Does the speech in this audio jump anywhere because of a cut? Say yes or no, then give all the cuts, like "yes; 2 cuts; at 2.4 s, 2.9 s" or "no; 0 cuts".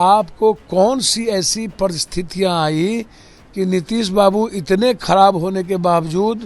no; 0 cuts